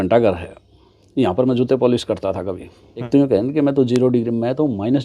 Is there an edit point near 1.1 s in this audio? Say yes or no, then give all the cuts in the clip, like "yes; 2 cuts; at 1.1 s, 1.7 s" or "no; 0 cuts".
no; 1 cut; at 3.1 s